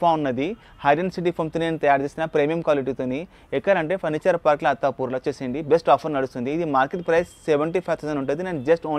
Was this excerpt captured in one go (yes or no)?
yes